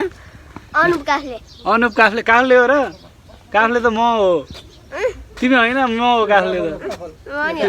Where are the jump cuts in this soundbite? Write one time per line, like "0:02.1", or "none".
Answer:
none